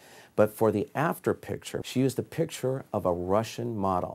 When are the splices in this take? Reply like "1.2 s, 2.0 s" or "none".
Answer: 1.7 s